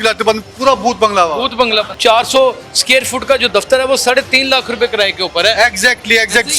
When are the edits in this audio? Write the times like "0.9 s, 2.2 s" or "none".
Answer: 1.9 s